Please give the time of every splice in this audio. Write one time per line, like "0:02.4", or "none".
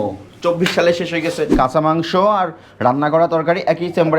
0:01.5